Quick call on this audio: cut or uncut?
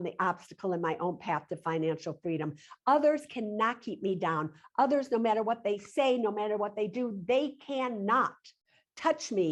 uncut